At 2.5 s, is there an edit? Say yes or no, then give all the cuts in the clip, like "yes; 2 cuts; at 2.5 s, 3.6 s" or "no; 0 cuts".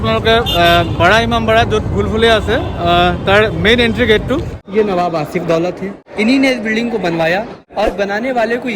no; 3 cuts; at 4.6 s, 6.0 s, 7.6 s